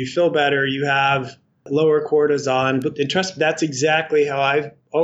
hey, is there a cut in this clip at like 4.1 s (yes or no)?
no